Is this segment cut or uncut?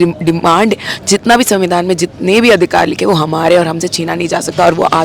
uncut